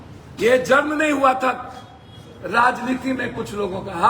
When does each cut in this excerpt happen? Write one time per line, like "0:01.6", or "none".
none